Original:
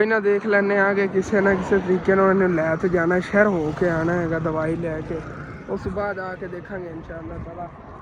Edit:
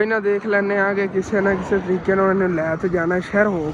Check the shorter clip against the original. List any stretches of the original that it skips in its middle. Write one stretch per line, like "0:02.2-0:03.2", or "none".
none